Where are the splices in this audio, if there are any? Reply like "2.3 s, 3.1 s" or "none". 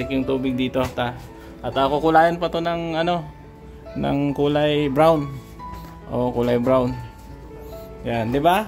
none